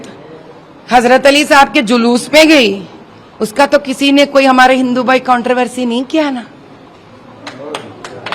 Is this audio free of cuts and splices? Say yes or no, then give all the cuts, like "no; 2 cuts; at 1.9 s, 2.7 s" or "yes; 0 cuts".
yes; 0 cuts